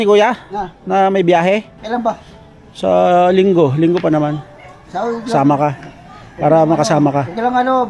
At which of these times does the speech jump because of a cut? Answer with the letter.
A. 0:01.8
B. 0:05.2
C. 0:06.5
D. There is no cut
A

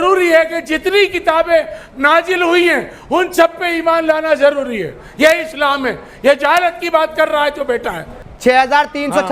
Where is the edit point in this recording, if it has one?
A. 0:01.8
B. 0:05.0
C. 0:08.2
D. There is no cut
C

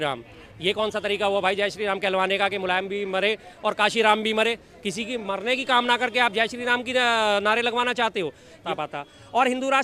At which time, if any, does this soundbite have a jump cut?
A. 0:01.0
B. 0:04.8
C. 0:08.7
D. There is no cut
C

